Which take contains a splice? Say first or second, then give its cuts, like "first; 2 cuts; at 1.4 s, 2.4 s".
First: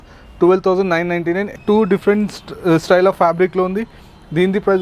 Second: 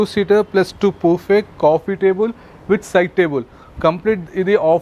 first; 1 cut; at 1.5 s